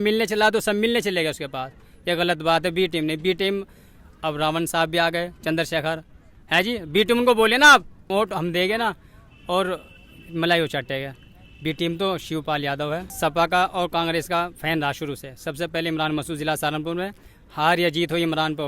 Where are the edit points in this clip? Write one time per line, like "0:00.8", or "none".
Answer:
0:08.0
0:13.1